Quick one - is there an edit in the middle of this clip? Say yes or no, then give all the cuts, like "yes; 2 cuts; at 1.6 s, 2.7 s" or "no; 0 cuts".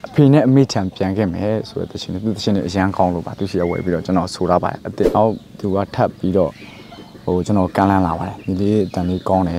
yes; 1 cut; at 5.1 s